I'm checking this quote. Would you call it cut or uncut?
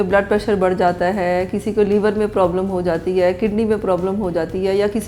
uncut